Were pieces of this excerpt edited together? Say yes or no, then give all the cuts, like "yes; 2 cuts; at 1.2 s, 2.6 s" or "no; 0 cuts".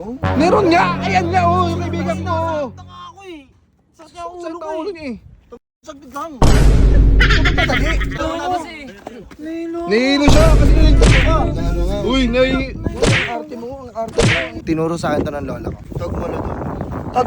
yes; 3 cuts; at 8.2 s, 14.6 s, 15.8 s